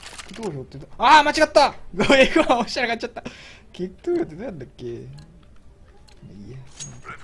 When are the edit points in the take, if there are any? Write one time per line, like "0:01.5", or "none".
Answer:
0:05.6